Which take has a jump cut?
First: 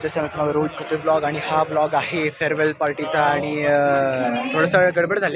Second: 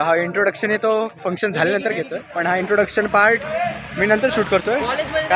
second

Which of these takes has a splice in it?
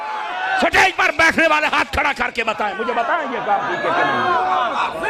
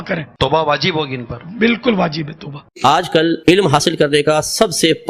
second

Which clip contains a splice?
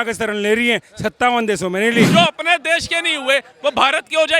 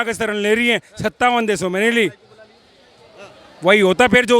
first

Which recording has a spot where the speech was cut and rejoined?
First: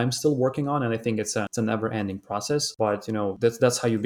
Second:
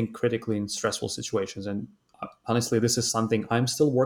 first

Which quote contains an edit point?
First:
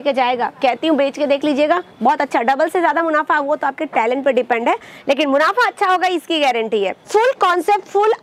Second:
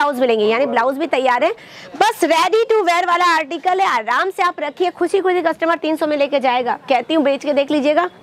first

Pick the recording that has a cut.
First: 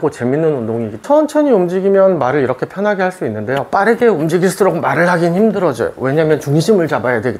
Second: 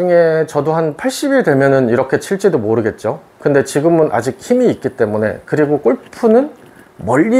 first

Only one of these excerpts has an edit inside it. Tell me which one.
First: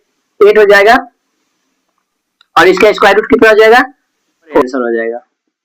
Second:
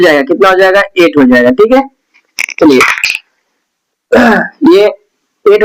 first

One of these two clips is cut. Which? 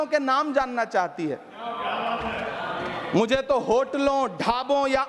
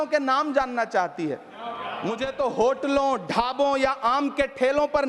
second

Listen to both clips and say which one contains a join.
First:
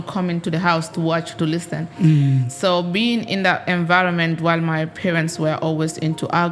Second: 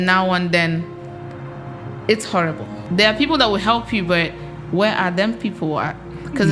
second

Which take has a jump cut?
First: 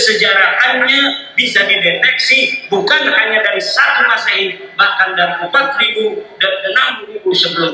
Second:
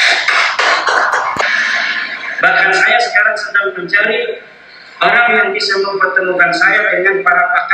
second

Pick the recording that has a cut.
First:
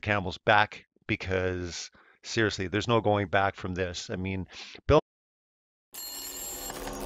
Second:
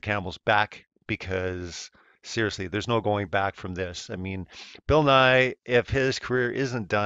second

